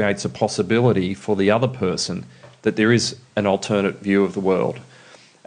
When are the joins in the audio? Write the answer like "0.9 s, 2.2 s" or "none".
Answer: none